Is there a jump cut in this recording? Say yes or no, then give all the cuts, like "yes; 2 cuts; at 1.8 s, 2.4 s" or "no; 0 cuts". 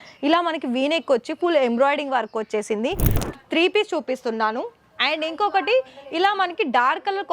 yes; 1 cut; at 3.2 s